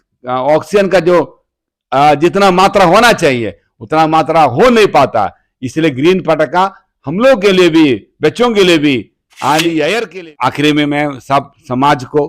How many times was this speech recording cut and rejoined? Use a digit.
1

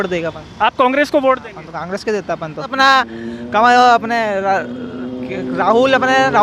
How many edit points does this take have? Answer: 1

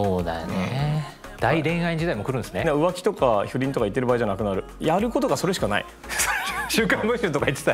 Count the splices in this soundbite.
3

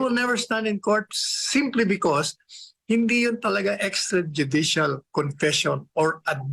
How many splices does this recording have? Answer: 0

